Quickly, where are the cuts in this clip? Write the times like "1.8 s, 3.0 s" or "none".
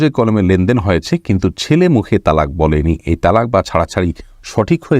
none